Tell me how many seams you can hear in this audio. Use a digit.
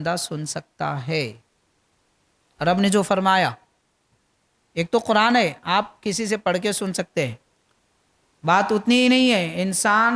0